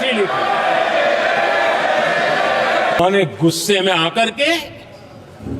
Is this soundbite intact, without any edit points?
no; 1 cut; at 3.0 s

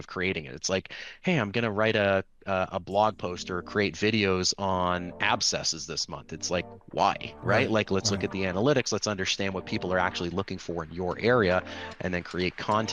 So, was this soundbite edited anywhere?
no; 0 cuts

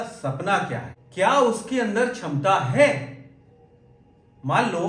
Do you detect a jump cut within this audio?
yes; 1 cut; at 1.0 s

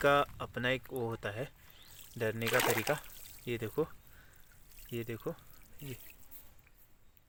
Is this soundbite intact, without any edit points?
yes; 0 cuts

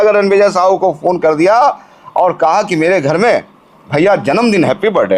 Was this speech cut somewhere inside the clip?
no; 0 cuts

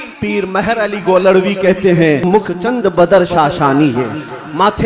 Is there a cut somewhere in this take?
yes; 1 cut; at 2.2 s

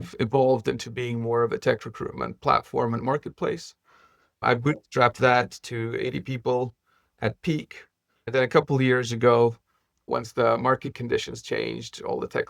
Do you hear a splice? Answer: no; 0 cuts

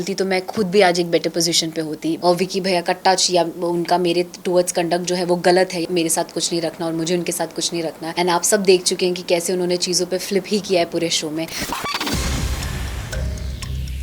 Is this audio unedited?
no; 4 cuts; at 2.2 s, 5.8 s, 8.0 s, 11.7 s

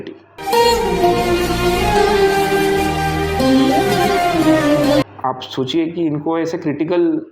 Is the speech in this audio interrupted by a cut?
yes; 1 cut; at 5.1 s

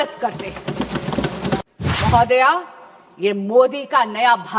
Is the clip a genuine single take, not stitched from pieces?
no; 1 cut; at 1.6 s

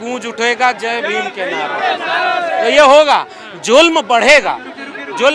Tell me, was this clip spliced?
no; 0 cuts

